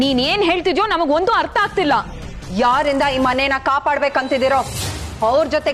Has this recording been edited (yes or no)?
no